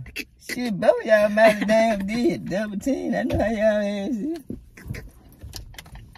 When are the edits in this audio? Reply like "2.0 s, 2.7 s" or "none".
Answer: none